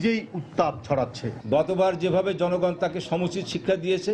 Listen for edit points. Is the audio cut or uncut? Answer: cut